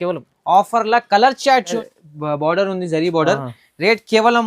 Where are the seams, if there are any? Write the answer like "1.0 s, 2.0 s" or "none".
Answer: 1.8 s

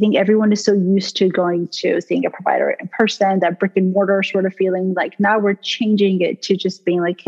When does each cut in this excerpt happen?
none

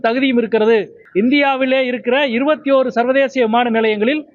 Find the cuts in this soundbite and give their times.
1.0 s

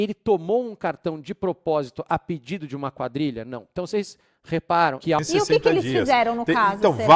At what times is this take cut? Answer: 5.2 s

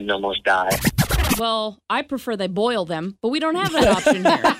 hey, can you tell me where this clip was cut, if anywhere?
1.2 s

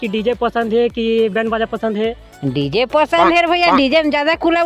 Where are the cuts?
none

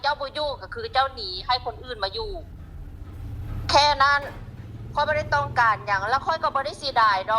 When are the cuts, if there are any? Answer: none

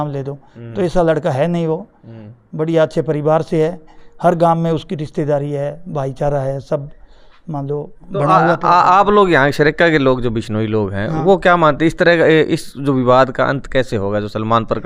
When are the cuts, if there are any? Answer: none

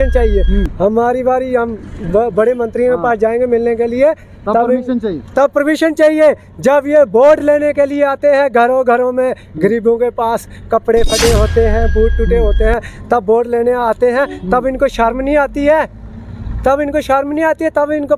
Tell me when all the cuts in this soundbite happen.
none

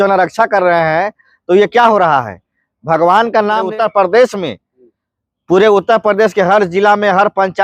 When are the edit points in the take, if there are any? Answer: 3.7 s

